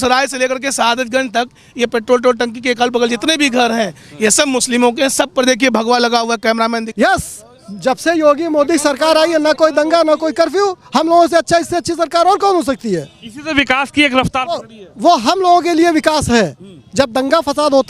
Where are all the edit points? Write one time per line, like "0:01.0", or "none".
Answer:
0:06.9